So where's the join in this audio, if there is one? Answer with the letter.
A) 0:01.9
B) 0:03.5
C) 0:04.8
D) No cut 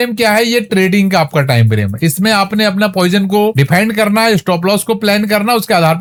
D